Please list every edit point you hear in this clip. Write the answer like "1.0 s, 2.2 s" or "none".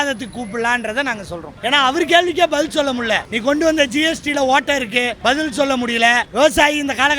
1.4 s, 3.3 s, 5.1 s, 6.3 s